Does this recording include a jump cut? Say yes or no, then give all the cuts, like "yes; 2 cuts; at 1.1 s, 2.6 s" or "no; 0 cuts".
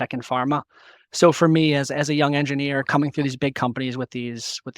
yes; 1 cut; at 2.9 s